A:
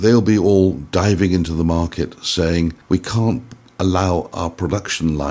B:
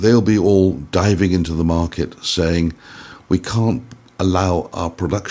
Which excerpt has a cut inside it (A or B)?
A